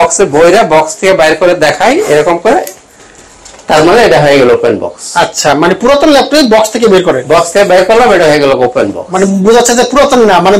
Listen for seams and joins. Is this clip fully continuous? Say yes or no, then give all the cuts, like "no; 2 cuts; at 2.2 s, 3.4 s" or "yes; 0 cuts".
yes; 0 cuts